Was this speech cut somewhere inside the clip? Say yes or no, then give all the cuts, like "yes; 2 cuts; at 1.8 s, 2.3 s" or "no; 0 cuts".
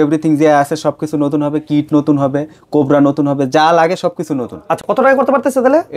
no; 0 cuts